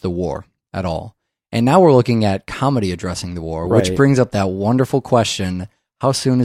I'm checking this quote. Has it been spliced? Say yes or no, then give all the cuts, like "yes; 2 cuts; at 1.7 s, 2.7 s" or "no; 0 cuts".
no; 0 cuts